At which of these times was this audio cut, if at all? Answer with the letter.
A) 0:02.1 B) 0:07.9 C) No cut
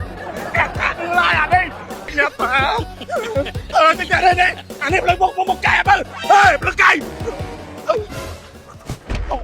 A